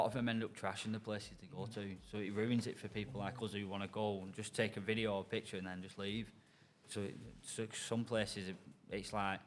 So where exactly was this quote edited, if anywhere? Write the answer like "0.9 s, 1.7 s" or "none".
none